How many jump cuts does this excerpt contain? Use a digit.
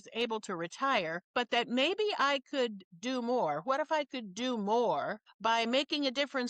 2